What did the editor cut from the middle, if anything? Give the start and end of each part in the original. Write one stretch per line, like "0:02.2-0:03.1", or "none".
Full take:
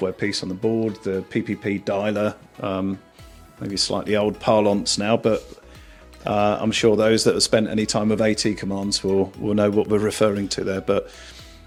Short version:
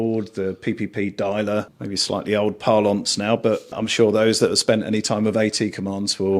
0:02.4-0:03.6
0:05.6-0:06.7